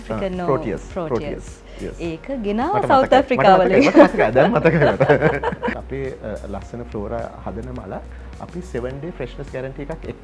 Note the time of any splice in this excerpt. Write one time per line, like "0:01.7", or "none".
0:05.8